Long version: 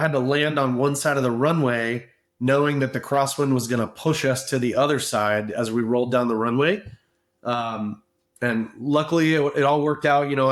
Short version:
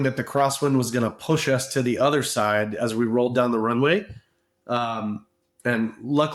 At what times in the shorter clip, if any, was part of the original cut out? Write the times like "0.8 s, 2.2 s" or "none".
none